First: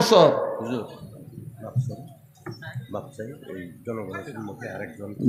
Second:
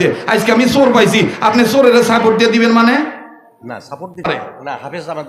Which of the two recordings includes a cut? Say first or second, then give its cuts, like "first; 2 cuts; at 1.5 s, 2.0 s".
second; 1 cut; at 4.4 s